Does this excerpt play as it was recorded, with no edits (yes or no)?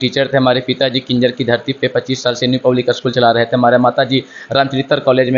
yes